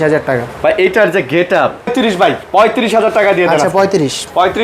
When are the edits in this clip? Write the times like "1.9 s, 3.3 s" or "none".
1.9 s